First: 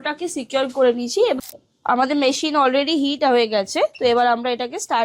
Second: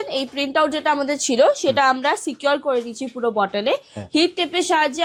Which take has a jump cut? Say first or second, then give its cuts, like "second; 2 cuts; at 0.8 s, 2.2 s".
first; 1 cut; at 1.4 s